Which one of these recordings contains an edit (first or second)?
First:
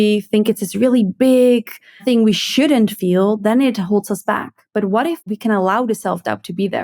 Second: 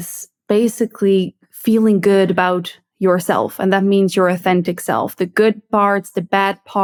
first